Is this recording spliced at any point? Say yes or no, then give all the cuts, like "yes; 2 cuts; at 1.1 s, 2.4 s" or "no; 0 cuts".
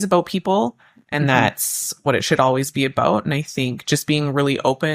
no; 0 cuts